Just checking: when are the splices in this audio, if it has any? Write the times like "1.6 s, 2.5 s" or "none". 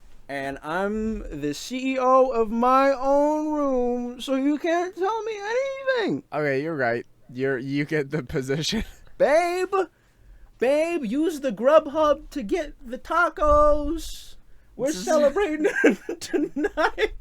6.3 s, 9.0 s